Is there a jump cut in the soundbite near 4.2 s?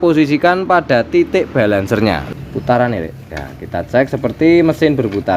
no; 1 cut; at 2.2 s

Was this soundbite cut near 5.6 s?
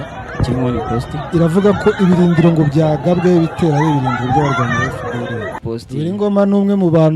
yes; 1 cut; at 5.6 s

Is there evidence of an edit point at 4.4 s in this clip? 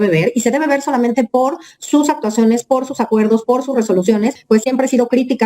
yes; 1 cut; at 4.4 s

